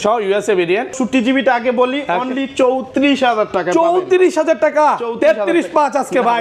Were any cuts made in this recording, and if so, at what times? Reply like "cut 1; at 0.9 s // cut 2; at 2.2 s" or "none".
cut 1; at 0.9 s